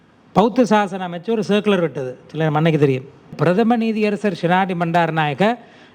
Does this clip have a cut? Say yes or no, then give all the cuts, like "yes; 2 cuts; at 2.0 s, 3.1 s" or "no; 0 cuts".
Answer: yes; 1 cut; at 3.4 s